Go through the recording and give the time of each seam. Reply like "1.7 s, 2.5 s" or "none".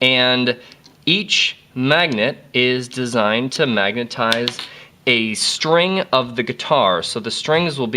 2.5 s